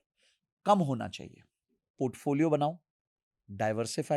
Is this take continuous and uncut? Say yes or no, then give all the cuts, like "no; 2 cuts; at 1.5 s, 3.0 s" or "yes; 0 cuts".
no; 1 cut; at 1.9 s